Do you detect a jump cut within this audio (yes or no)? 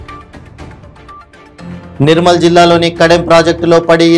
yes